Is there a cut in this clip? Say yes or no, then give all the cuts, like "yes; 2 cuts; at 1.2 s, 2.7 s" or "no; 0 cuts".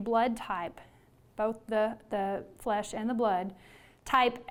no; 0 cuts